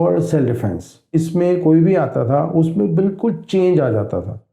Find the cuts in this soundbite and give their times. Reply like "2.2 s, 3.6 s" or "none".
1.1 s